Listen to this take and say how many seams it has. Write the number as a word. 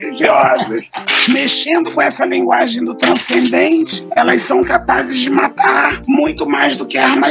one